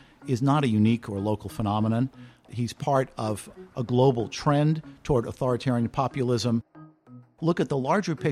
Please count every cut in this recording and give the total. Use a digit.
1